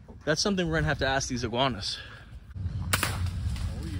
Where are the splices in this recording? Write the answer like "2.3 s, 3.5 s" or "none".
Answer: 2.6 s